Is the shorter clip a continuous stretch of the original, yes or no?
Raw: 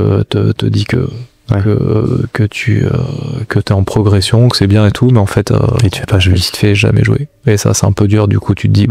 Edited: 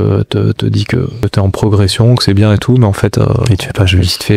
no